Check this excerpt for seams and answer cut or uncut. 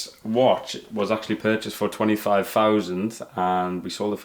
uncut